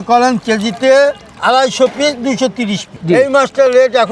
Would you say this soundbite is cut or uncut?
cut